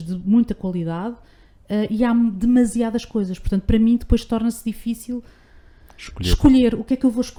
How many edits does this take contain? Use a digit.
0